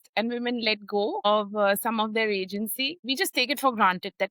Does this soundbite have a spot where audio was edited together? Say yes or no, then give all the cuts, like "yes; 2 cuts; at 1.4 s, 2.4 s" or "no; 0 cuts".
yes; 2 cuts; at 1.2 s, 2.9 s